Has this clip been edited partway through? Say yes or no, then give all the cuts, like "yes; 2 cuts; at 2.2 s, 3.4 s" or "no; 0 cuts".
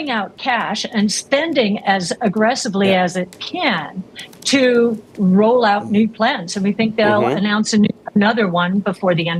no; 0 cuts